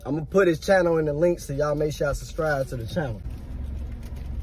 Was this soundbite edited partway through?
yes; 1 cut; at 3.2 s

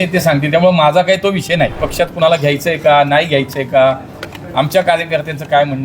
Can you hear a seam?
yes; 1 cut; at 1.8 s

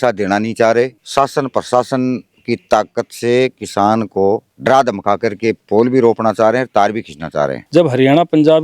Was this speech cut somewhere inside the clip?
yes; 2 cuts; at 1.0 s, 7.6 s

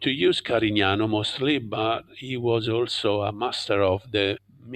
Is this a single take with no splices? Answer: yes; 0 cuts

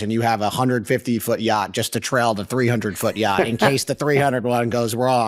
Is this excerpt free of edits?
yes; 0 cuts

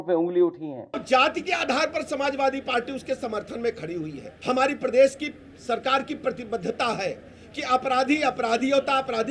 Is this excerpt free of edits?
no; 2 cuts; at 1.0 s, 4.2 s

